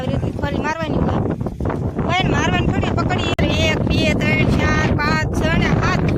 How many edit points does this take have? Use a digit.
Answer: 1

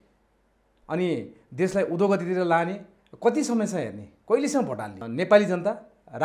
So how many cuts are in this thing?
1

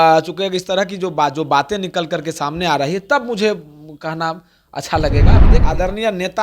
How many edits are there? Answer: 1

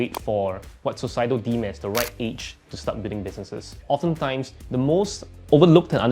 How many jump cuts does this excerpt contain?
2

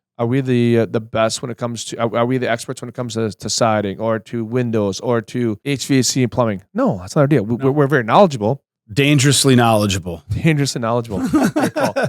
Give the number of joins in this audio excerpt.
1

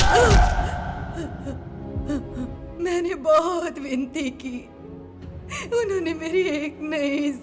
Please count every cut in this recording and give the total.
0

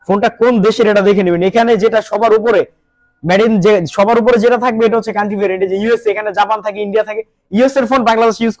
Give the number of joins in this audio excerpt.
0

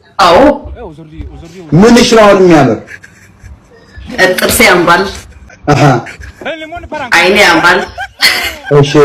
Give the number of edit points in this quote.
0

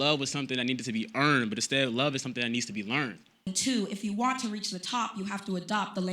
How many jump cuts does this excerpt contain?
1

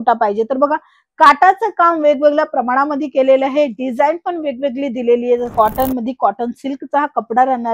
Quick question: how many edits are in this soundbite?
1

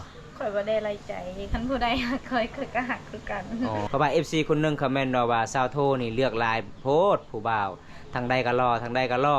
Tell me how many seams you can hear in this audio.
1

